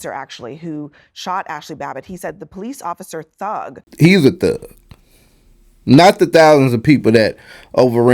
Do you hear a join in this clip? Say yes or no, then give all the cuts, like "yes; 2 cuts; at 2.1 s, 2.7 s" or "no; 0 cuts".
yes; 1 cut; at 3.9 s